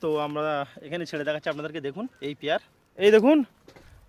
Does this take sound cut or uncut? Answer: cut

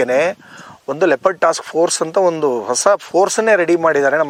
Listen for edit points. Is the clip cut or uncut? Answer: uncut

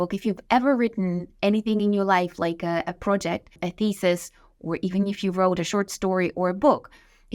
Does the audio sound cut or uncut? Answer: cut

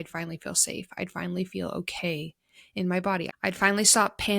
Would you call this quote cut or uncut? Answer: cut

